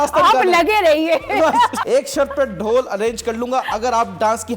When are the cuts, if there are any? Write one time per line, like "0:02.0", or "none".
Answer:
0:01.8